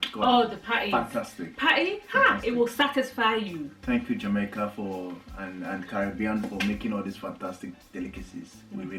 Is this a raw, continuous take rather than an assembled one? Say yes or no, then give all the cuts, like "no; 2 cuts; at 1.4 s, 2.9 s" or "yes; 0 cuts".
yes; 0 cuts